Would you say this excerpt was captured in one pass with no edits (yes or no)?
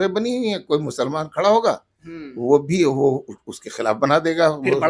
yes